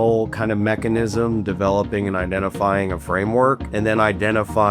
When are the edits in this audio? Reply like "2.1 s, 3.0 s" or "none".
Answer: 3.7 s